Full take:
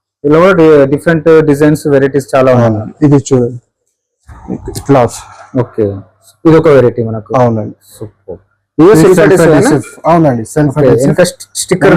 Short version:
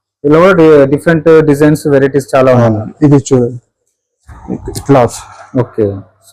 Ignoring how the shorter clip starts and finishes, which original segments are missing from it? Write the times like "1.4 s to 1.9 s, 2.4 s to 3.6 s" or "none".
none